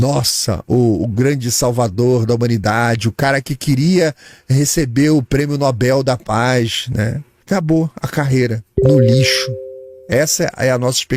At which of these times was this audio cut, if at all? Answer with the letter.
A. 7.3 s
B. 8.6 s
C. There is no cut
A